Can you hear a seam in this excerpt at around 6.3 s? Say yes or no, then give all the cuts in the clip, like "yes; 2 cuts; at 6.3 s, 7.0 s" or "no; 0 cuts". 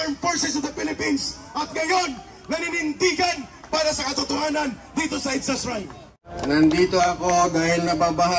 yes; 1 cut; at 6.3 s